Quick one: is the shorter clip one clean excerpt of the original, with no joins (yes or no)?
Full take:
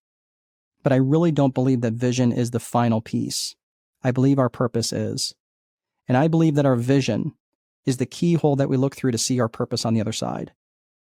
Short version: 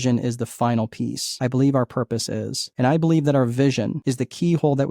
no